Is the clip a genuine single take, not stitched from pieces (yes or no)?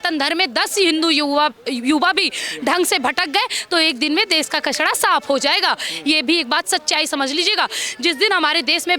yes